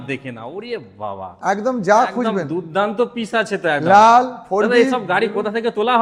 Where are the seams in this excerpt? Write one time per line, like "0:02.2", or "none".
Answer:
none